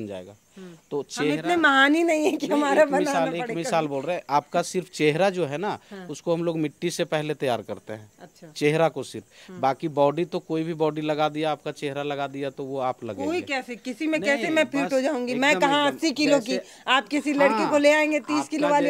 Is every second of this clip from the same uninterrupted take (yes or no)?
yes